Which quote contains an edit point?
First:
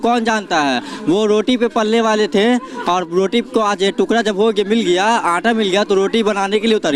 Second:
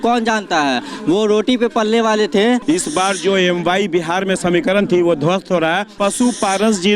second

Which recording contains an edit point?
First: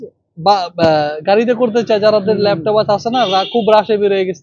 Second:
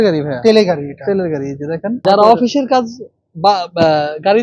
second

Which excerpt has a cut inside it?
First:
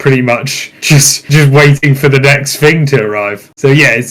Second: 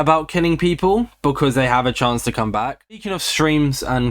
second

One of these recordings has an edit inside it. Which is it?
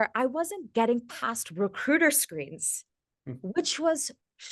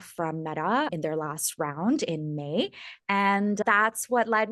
second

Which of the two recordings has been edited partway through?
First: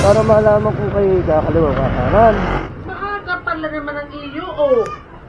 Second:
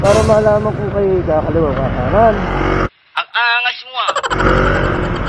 first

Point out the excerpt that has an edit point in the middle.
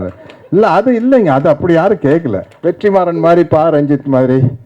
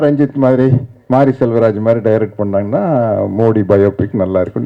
first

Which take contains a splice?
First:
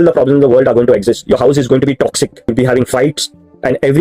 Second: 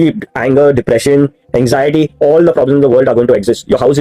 first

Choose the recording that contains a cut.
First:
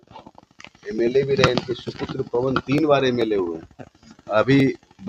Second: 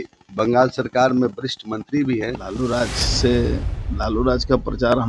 second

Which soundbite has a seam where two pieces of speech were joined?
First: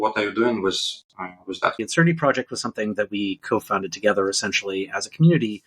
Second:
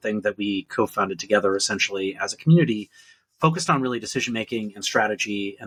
first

